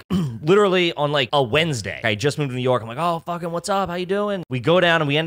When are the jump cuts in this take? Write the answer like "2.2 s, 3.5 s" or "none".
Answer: 1.3 s, 2.0 s, 4.5 s